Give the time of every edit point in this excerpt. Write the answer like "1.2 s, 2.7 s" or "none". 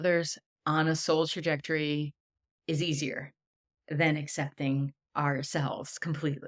none